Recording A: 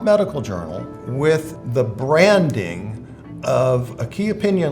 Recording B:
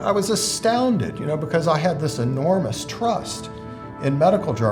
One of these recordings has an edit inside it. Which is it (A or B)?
A